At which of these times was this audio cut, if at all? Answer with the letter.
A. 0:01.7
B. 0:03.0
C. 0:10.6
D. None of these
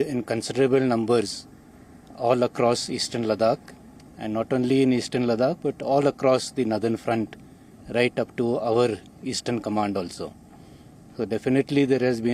D